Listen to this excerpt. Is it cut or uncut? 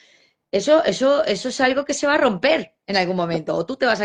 uncut